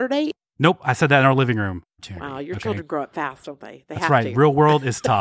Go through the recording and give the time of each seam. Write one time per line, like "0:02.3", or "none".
0:01.6